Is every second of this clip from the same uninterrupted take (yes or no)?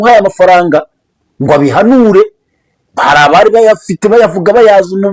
yes